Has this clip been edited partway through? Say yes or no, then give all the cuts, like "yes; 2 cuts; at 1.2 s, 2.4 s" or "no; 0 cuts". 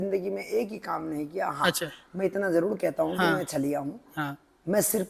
no; 0 cuts